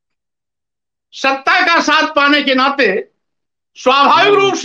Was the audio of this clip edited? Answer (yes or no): no